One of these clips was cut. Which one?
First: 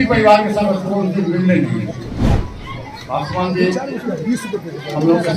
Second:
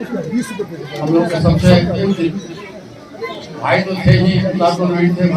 first; 1 cut; at 2.2 s

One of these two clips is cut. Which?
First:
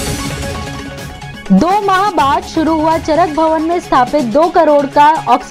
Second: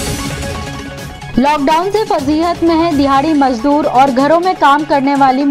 second; 1 cut; at 1.2 s

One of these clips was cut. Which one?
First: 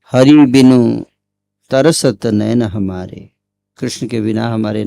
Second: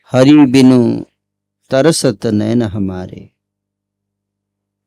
first; 1 cut; at 3.6 s

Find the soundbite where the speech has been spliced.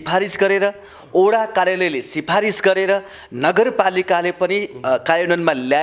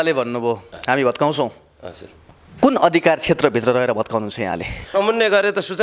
second; 1 cut; at 4.9 s

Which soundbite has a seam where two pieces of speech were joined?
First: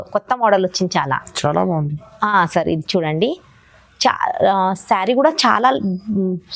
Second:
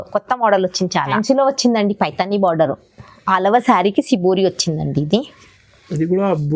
second; 1 cut; at 1.1 s

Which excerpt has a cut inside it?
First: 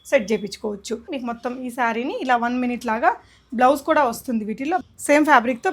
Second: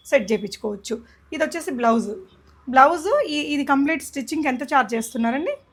first; 2 cuts; at 1.1 s, 4.8 s

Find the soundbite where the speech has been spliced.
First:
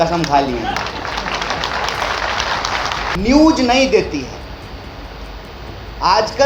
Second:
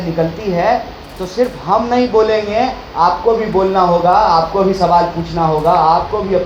first; 1 cut; at 3.1 s

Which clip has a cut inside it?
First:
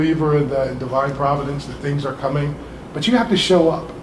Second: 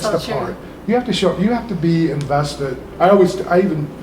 second; 1 cut; at 2.8 s

